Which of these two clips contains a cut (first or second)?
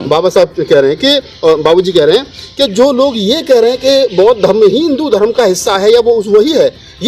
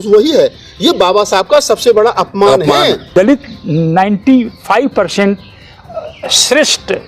second